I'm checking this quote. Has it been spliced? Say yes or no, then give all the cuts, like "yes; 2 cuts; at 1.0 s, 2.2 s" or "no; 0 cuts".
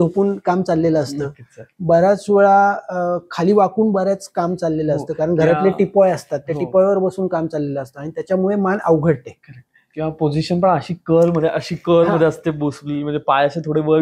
no; 0 cuts